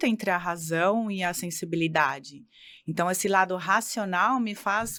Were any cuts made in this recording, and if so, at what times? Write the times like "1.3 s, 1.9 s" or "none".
none